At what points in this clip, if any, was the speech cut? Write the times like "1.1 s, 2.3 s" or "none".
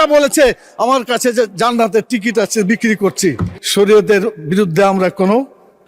3.5 s